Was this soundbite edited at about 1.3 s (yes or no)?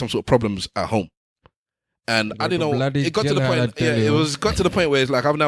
no